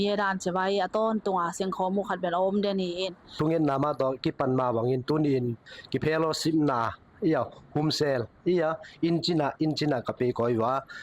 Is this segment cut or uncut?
cut